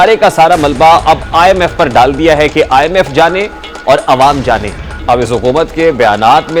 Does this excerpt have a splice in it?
no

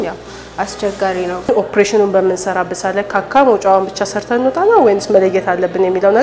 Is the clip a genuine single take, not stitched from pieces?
no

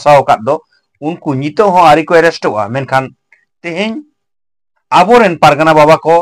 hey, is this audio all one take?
yes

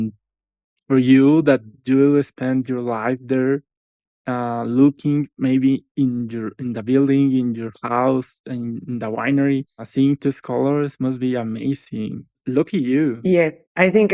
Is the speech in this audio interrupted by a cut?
yes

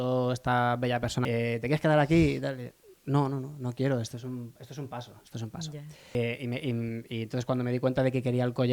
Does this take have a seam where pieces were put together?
yes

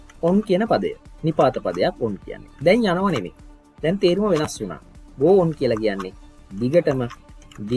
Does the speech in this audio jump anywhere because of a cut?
no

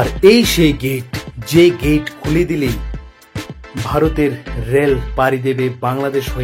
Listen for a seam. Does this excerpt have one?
no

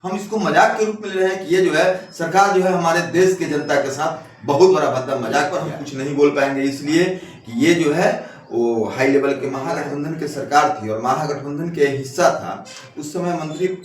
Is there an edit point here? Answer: yes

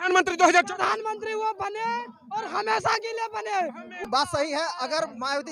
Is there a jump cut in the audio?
yes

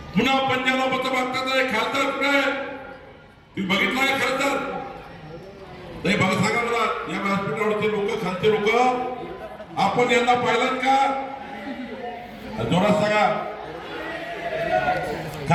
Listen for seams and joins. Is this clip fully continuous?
yes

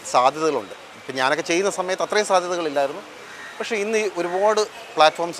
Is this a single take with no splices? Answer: yes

